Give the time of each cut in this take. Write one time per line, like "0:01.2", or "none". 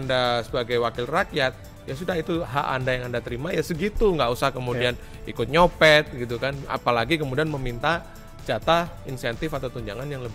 none